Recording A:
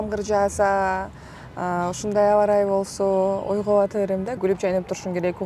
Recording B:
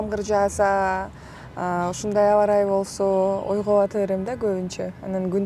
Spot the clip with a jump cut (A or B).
A